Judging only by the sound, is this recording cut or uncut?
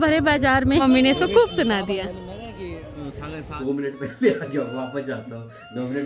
cut